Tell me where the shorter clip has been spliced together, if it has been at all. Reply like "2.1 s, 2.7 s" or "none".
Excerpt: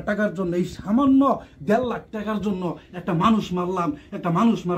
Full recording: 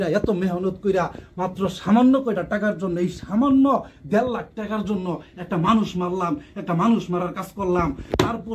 none